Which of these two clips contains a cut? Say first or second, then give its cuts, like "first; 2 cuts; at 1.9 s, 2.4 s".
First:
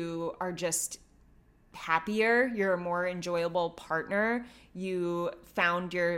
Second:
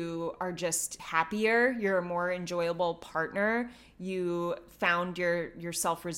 second; 1 cut; at 0.9 s